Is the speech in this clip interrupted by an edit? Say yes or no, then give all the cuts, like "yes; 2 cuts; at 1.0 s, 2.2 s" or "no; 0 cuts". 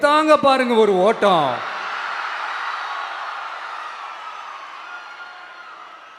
no; 0 cuts